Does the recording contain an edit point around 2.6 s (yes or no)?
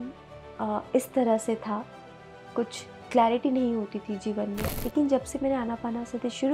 no